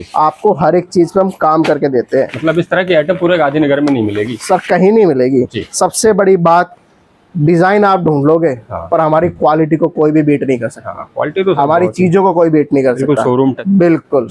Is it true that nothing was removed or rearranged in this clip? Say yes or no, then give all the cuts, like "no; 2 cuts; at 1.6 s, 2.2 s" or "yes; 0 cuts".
yes; 0 cuts